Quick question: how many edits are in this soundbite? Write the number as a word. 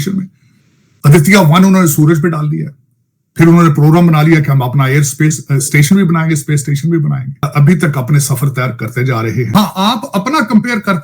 two